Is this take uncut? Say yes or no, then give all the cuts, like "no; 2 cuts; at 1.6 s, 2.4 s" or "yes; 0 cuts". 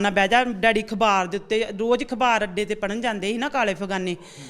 yes; 0 cuts